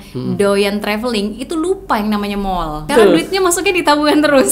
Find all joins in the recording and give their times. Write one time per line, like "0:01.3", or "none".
0:02.9

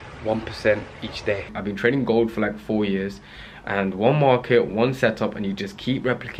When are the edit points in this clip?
0:01.5

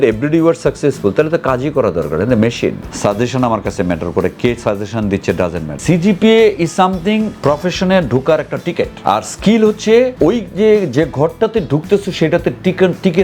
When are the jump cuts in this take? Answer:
0:02.9
0:05.7
0:07.3
0:08.9
0:10.1

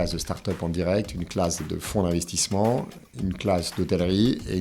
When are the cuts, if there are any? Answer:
0:01.6

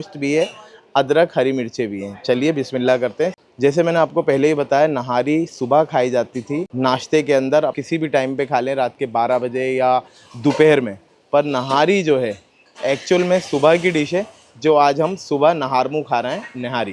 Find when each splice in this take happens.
none

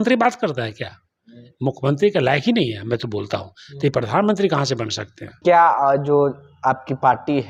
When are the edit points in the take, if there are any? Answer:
0:05.4

